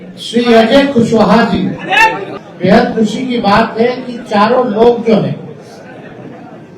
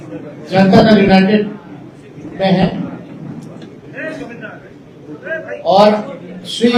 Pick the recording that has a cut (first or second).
first